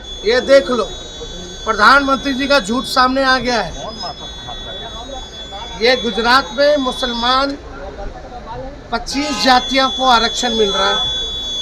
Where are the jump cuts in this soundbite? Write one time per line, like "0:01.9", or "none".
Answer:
none